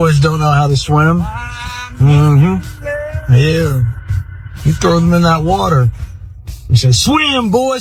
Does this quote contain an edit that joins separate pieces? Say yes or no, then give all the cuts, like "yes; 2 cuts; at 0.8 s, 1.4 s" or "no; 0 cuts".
no; 0 cuts